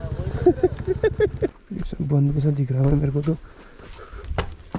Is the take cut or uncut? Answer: cut